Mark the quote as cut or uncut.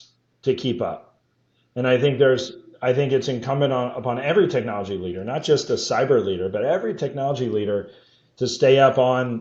uncut